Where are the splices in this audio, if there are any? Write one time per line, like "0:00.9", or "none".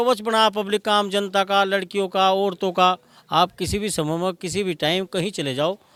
none